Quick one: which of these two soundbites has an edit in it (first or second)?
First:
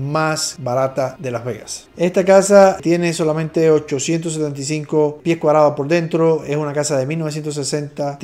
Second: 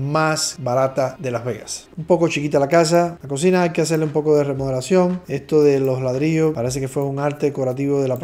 second